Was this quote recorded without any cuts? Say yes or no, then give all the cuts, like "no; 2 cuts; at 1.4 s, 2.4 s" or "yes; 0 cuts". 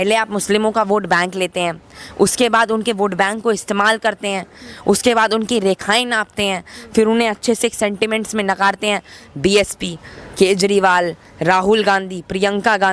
yes; 0 cuts